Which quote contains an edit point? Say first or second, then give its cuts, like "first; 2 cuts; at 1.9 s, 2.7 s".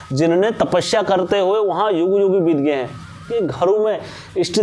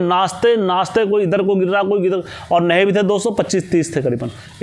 first; 1 cut; at 3.3 s